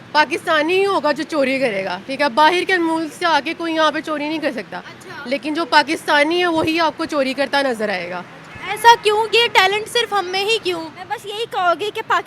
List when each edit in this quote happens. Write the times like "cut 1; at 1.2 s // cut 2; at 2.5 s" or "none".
cut 1; at 11.2 s